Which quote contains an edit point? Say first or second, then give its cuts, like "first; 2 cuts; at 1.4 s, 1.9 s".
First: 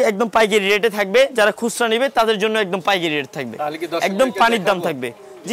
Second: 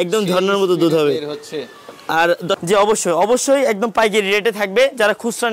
second; 1 cut; at 2.6 s